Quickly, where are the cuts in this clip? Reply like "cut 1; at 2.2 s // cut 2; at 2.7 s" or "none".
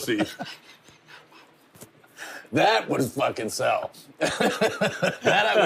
none